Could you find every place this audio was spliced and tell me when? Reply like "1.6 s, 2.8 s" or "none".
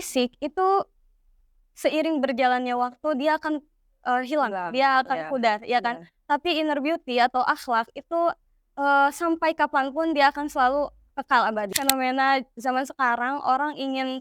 11.8 s